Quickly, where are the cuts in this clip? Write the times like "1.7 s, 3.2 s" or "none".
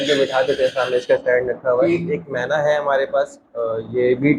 1.9 s